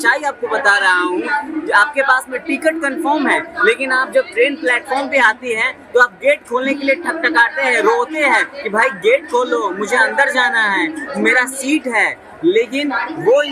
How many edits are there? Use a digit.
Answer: 0